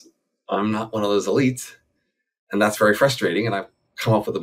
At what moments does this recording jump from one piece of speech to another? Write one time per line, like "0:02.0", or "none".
none